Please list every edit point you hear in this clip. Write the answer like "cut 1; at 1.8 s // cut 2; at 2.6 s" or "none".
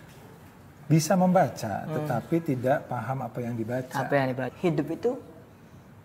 cut 1; at 4.5 s

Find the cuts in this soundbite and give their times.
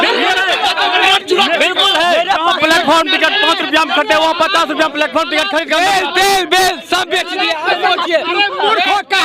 none

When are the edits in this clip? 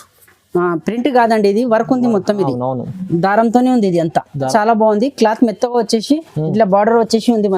cut 1; at 4.5 s

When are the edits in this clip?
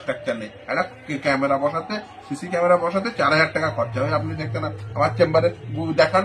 none

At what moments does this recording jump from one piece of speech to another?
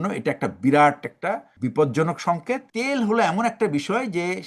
cut 1; at 1.5 s // cut 2; at 2.7 s

